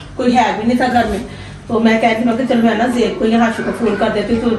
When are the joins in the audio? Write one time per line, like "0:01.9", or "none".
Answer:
none